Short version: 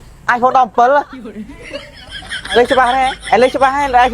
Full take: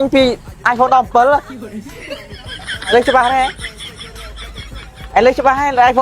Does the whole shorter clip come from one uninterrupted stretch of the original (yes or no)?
no